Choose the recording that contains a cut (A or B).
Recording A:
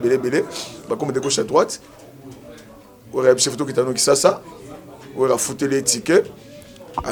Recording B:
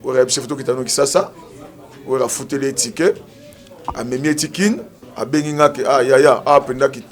B